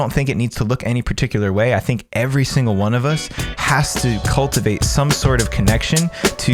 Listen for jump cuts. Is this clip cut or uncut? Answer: uncut